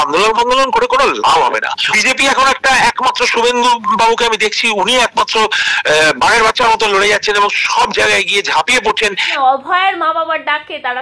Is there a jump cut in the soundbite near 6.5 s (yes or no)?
no